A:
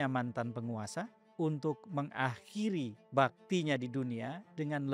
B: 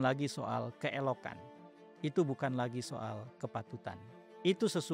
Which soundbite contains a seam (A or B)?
A